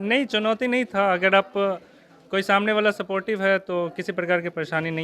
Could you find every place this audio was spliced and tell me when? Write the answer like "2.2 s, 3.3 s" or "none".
none